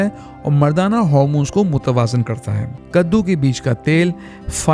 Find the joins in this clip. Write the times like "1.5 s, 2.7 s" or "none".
2.7 s